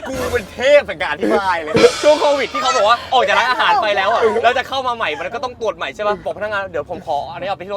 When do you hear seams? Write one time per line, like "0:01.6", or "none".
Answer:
0:02.0